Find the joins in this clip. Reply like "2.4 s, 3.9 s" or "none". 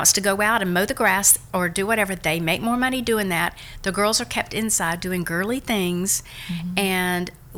none